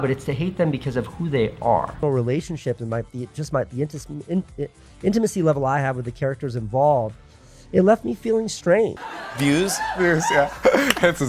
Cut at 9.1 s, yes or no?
yes